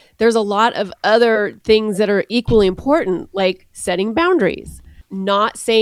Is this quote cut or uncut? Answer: uncut